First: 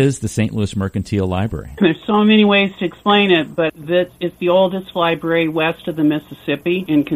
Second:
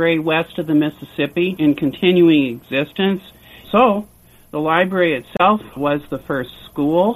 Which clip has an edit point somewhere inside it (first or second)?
second